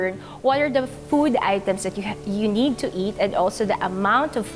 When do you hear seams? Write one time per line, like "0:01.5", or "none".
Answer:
none